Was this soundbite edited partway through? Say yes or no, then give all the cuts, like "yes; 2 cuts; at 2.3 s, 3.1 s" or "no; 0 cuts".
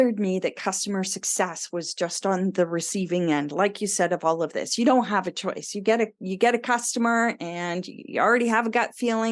no; 0 cuts